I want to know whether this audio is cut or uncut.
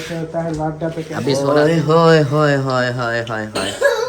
cut